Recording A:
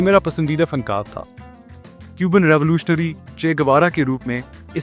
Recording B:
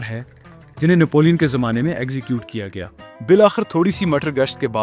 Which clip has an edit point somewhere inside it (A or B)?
B